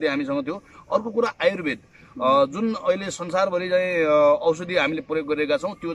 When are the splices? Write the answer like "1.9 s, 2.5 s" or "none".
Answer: none